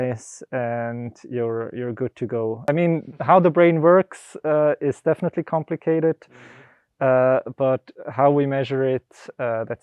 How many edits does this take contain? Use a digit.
1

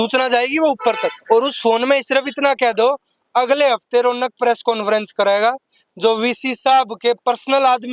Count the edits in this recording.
1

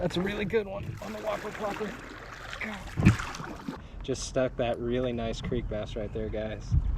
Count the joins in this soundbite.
1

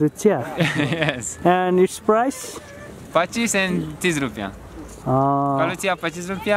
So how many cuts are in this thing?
0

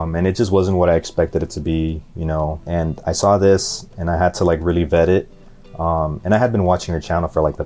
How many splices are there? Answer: 1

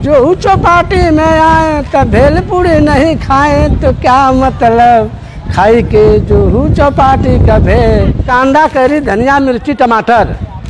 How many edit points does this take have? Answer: 1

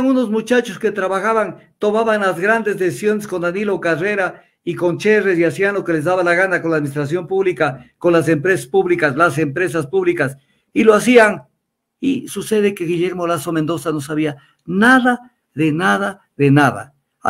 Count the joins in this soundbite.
0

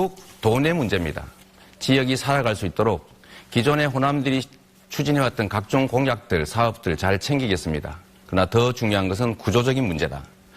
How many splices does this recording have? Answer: 1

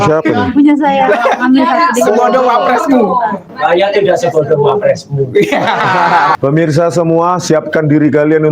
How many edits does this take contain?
1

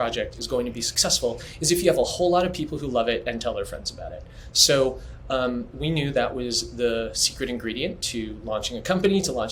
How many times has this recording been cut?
0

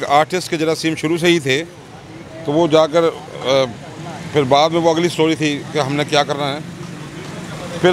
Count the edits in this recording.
0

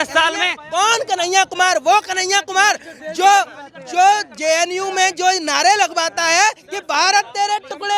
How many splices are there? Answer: 0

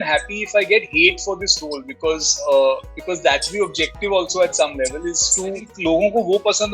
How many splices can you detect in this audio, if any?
1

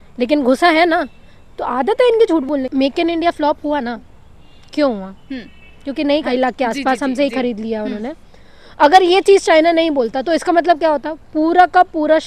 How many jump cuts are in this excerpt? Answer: 2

